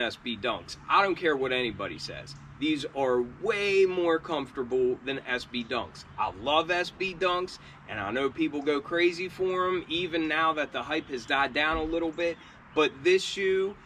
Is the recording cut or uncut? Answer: uncut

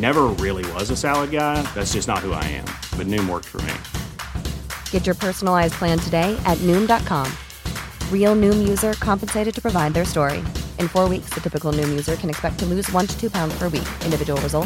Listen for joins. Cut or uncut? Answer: uncut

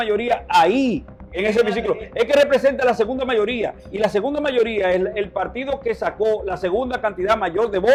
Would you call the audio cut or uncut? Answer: uncut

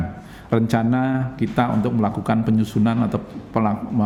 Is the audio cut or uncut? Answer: uncut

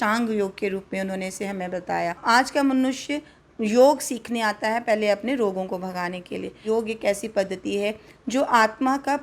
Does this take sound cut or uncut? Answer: cut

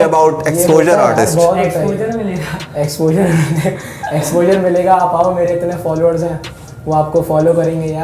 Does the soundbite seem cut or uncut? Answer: uncut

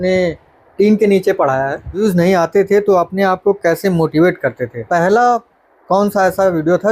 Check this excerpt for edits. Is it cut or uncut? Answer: cut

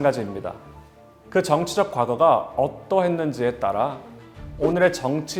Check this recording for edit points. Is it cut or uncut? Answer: uncut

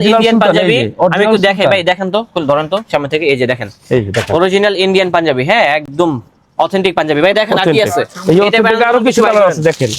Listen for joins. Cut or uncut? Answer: uncut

